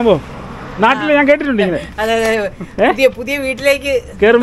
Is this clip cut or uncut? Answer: uncut